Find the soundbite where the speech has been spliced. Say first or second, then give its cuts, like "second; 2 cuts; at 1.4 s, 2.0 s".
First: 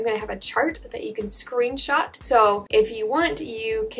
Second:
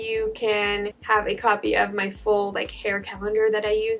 first; 1 cut; at 2.6 s